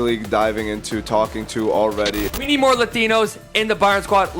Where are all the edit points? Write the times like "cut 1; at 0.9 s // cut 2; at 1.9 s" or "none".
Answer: cut 1; at 2.3 s